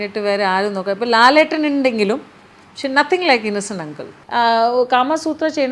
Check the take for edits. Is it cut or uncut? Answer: cut